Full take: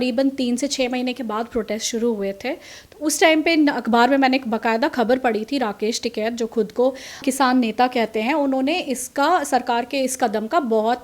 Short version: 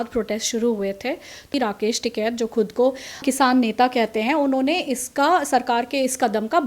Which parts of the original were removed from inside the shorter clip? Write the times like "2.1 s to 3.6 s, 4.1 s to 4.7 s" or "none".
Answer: 2.9 s to 5.5 s